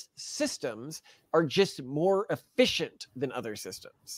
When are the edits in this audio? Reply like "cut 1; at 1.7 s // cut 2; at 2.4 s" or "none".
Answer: cut 1; at 1.1 s